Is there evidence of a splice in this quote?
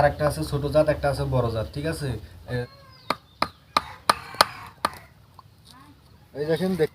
yes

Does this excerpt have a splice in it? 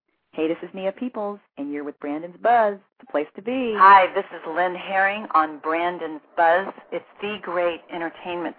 yes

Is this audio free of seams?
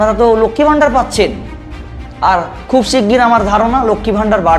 yes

